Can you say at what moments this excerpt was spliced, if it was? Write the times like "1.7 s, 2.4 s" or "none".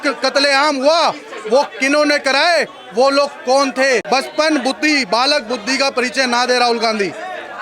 4.0 s